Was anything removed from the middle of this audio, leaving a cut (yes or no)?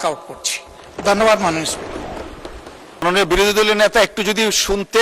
yes